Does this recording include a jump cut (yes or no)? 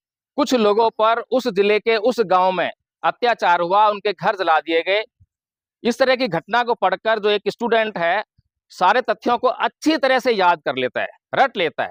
no